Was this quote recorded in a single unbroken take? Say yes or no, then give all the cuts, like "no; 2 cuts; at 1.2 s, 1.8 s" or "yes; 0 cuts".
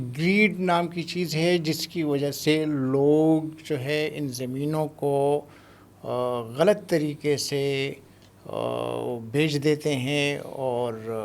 yes; 0 cuts